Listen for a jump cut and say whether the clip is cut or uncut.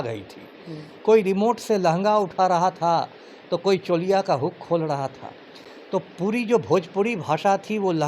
uncut